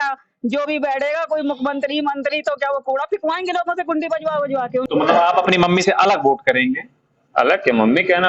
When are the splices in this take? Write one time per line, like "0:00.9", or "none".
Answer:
0:04.9